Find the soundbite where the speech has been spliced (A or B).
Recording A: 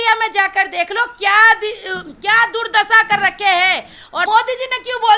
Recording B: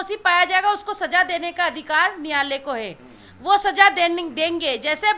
A